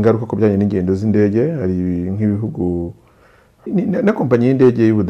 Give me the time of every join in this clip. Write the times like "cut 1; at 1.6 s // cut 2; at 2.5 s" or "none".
cut 1; at 3.7 s